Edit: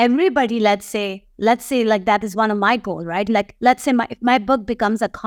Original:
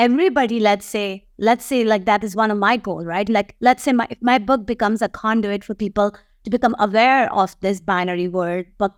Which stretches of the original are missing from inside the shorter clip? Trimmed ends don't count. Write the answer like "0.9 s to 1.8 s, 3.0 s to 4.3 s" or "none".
none